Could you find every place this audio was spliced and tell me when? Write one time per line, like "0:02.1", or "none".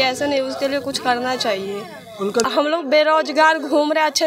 0:02.4